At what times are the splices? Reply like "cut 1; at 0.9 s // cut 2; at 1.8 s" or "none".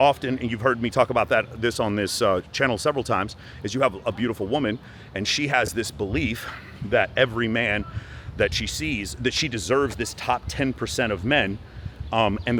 none